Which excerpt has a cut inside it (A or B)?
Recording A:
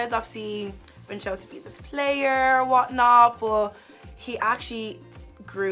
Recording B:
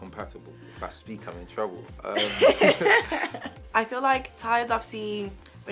B